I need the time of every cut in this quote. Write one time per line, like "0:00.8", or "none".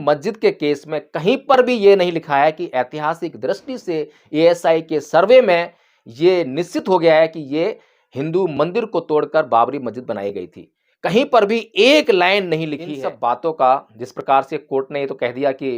0:12.9